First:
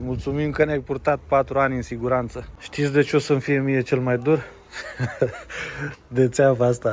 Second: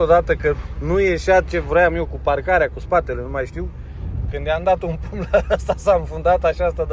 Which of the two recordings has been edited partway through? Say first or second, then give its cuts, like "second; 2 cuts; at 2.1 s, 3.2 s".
first; 1 cut; at 2.4 s